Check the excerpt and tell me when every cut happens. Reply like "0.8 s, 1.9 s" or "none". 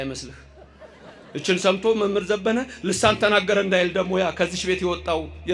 none